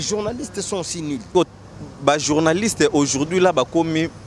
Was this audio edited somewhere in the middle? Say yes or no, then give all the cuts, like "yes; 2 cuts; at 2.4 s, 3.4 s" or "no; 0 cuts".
yes; 1 cut; at 1.2 s